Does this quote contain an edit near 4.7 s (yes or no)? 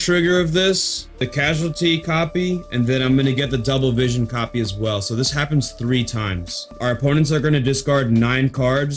no